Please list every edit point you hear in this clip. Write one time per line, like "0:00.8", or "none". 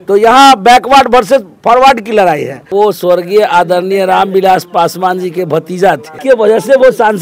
0:02.6
0:06.1